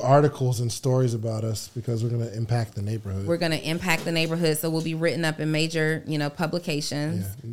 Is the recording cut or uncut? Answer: uncut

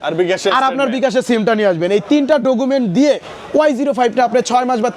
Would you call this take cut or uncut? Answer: uncut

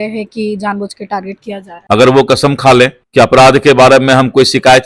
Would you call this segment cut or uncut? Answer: cut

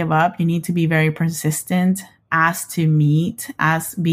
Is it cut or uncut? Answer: uncut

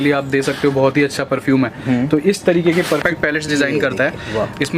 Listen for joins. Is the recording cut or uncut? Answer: cut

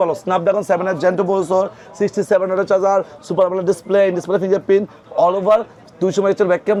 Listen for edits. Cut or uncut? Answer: uncut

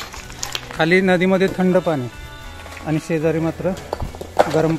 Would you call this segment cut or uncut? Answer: uncut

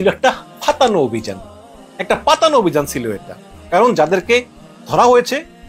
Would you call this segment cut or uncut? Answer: uncut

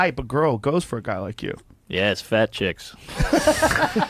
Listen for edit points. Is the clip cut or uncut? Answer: uncut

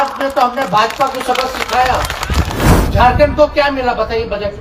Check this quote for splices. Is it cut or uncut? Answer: cut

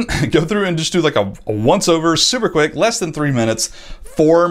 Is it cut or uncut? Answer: uncut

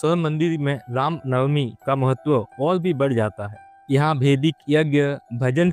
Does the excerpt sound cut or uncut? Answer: uncut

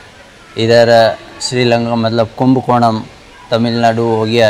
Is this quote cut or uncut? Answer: uncut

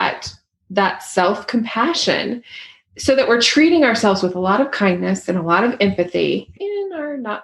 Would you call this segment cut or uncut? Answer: cut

